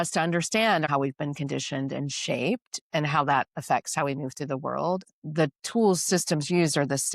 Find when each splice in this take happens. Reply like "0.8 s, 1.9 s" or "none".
0.9 s, 5.0 s